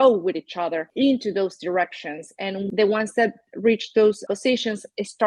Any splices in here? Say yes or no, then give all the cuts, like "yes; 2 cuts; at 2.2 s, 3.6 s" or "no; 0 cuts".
yes; 3 cuts; at 0.8 s, 2.7 s, 4.2 s